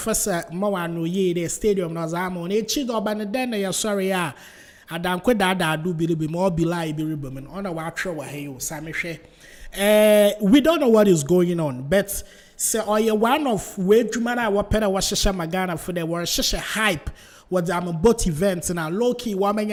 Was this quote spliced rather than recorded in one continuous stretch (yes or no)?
no